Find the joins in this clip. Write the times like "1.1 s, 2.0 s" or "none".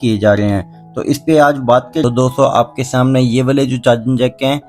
2.0 s